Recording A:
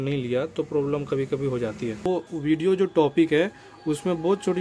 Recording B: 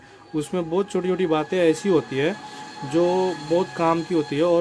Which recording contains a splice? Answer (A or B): A